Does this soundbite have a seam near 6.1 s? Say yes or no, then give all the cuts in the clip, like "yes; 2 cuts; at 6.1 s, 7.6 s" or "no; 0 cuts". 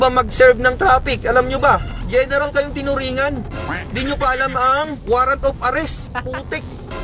yes; 2 cuts; at 1.9 s, 6.1 s